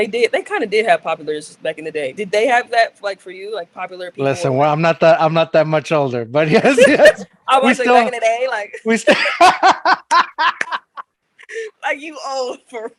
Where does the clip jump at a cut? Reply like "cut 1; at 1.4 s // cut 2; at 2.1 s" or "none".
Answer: none